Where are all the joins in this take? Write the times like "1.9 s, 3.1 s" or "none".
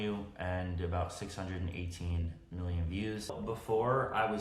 3.4 s